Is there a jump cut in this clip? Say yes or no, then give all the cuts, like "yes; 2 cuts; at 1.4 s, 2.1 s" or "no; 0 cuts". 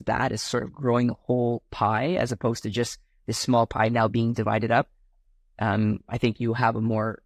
no; 0 cuts